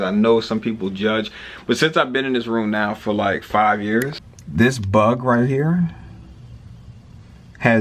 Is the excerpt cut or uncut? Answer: cut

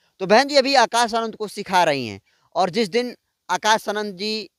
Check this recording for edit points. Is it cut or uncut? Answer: uncut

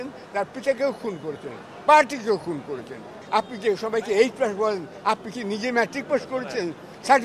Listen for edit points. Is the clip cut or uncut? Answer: cut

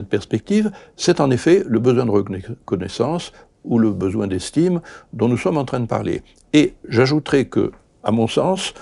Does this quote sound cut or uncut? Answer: uncut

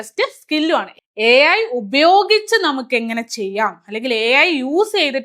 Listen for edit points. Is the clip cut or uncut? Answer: cut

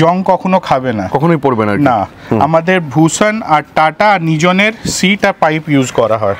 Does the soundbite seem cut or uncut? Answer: uncut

